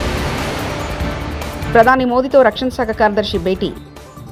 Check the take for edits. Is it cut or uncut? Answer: uncut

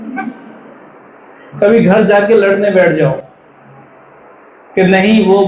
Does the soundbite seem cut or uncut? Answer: uncut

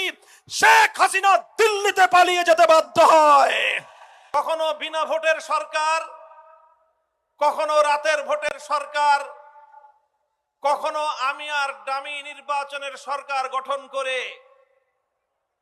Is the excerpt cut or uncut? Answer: cut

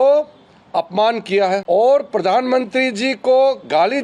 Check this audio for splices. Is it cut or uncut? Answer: cut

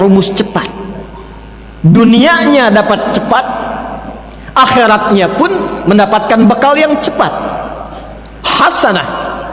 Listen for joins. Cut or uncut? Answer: uncut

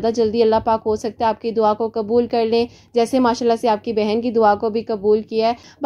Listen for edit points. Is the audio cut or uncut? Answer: uncut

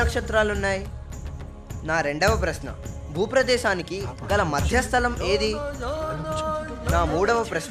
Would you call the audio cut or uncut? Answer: uncut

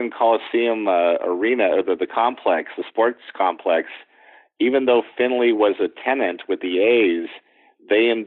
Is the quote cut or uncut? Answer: uncut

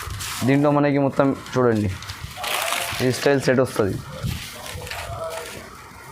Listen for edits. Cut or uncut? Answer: uncut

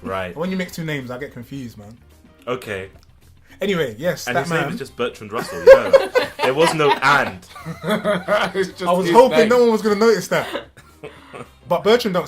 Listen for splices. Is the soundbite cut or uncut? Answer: cut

